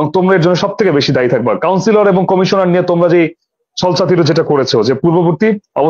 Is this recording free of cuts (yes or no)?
yes